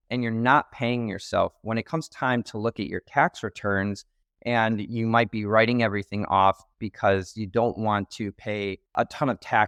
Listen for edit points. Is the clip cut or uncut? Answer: uncut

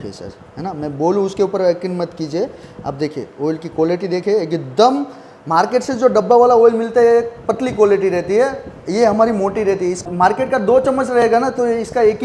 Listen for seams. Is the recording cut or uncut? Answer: cut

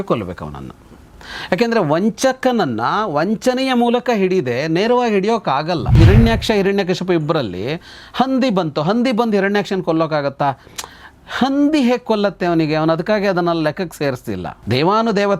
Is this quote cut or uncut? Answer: cut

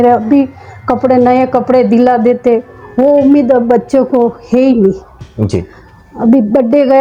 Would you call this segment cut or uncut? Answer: uncut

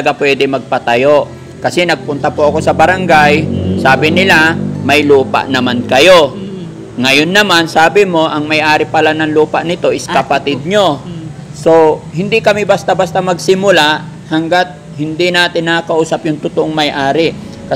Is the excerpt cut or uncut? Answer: uncut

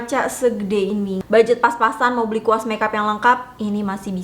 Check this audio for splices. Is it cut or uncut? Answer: cut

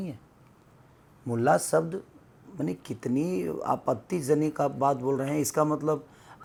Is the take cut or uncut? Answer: uncut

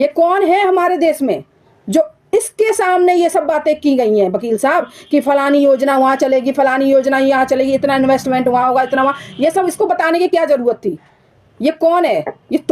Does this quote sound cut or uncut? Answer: uncut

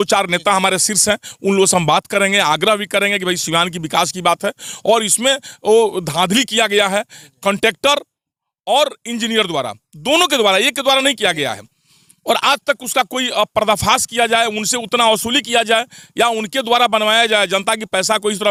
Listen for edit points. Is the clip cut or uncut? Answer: uncut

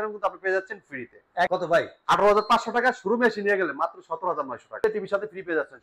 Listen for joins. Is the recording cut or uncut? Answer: cut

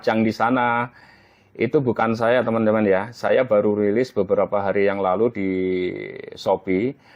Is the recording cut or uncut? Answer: uncut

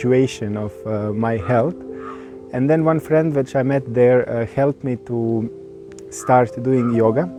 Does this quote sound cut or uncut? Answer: uncut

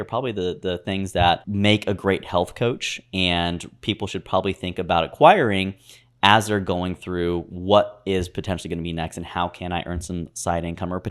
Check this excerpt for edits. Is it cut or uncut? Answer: cut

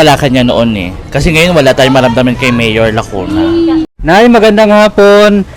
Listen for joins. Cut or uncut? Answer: cut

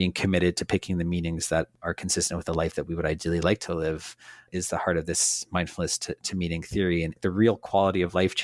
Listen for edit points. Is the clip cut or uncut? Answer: cut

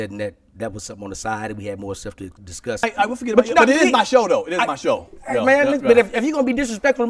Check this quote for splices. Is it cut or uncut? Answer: cut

